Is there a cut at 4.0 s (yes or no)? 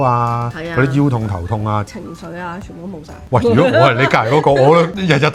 no